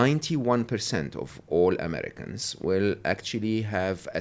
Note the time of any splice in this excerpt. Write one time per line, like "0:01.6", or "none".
none